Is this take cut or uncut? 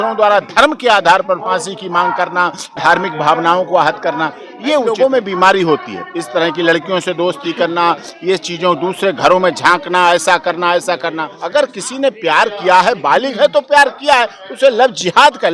cut